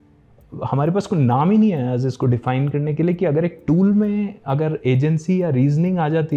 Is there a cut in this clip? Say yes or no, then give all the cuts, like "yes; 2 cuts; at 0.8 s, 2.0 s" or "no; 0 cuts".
no; 0 cuts